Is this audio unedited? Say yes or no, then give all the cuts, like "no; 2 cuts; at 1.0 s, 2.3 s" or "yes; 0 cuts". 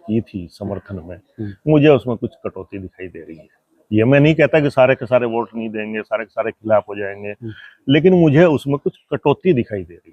yes; 0 cuts